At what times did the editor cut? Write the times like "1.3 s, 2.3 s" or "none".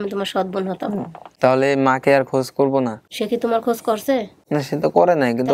1.2 s, 3.1 s, 4.4 s